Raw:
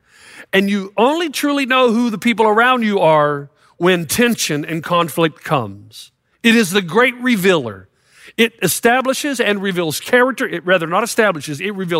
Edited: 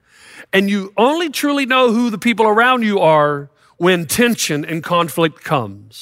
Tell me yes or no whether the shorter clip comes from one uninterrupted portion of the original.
yes